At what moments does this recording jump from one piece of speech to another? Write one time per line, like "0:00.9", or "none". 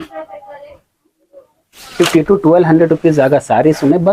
0:01.9